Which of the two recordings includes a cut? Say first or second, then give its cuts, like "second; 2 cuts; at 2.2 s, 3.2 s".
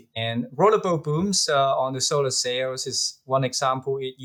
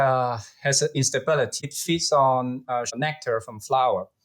second; 2 cuts; at 1.7 s, 2.9 s